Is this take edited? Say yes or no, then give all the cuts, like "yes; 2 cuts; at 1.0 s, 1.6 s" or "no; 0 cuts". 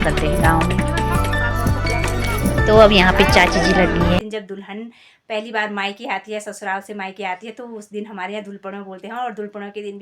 yes; 1 cut; at 4.2 s